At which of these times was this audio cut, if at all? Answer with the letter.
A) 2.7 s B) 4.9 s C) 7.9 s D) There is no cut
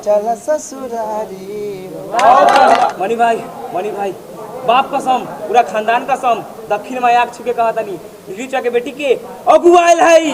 A